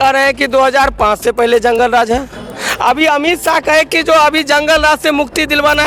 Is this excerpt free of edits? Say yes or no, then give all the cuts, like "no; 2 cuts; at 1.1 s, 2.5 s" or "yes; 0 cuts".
yes; 0 cuts